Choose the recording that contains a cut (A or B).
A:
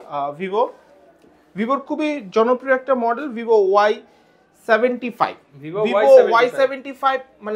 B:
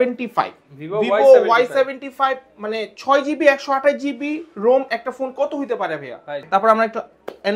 B